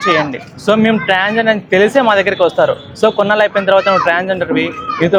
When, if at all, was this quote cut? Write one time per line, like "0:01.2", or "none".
none

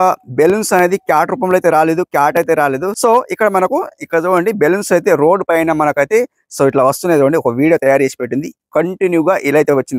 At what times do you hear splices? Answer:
none

